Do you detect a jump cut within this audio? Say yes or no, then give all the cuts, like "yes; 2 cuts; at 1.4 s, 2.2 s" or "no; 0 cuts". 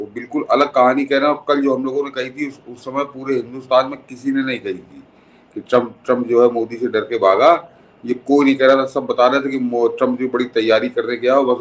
no; 0 cuts